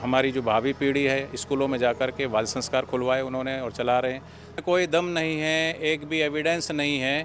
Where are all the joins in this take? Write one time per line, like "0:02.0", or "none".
0:04.5